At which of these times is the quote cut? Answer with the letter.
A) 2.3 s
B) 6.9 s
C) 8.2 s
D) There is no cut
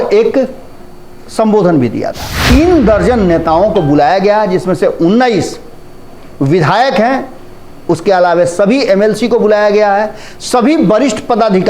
A